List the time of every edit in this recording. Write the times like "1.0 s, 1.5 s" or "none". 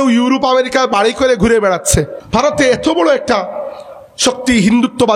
2.2 s